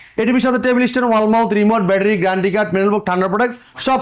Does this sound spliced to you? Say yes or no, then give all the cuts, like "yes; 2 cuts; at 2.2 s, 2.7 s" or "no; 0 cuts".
no; 0 cuts